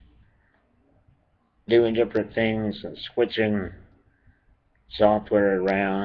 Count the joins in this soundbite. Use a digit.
1